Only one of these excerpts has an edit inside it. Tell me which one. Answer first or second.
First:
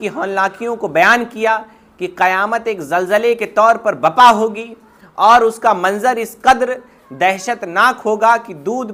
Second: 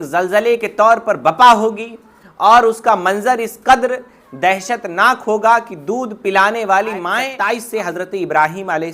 second